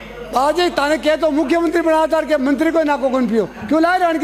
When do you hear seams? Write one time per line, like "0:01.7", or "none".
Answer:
none

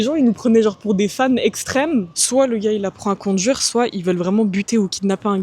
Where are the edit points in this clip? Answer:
0:02.1

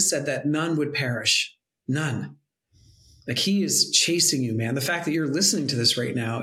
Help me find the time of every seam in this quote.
none

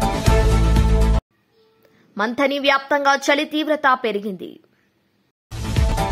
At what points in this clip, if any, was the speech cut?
none

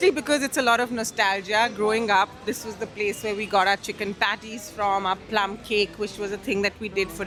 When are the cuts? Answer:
none

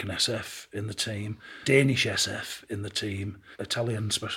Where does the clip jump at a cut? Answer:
0:01.6
0:03.4

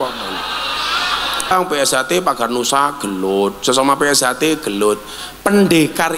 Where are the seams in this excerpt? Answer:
0:01.5

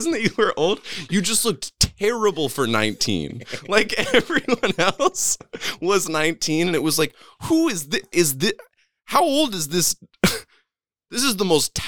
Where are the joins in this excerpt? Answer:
none

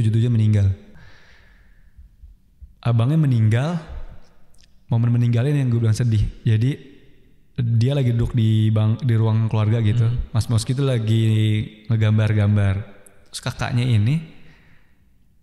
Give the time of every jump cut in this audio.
0:00.9

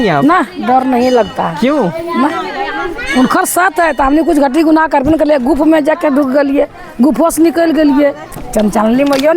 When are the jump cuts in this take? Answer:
0:08.3

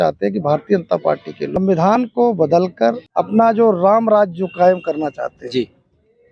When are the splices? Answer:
0:01.6
0:03.1

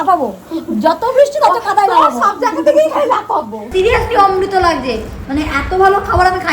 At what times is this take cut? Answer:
0:03.7

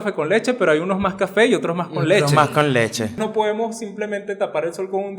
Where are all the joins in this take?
0:03.2

